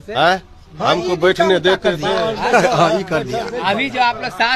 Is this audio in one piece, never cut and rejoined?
yes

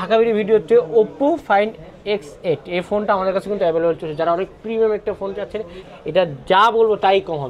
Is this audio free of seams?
no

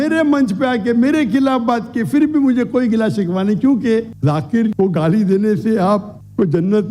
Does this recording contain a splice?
yes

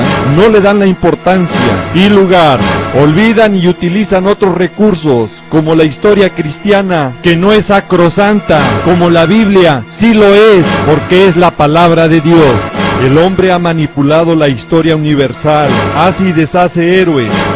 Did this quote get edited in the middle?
yes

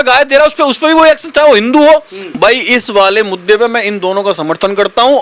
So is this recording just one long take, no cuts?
no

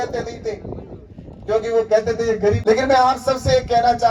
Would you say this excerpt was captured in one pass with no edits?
no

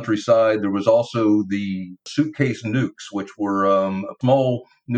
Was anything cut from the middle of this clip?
yes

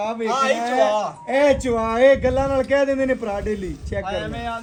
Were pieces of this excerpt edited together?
no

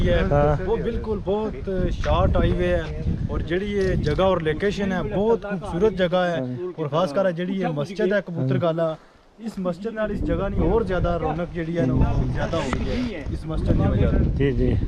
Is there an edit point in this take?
no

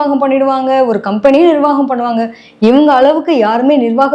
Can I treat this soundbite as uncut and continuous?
yes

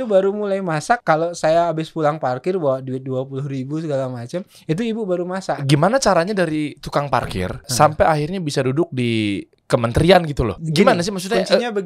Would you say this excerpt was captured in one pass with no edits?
no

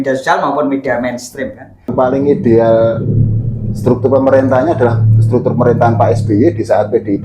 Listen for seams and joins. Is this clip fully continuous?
no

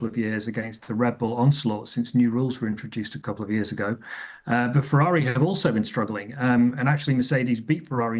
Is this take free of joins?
no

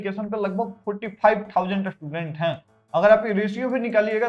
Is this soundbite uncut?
yes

